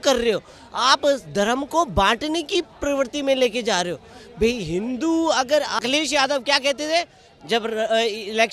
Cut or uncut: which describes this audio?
cut